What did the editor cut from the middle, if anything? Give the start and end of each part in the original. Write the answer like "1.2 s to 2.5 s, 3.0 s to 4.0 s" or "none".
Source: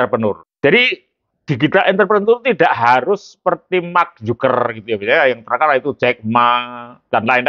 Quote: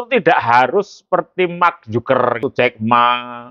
4.8 s to 5.9 s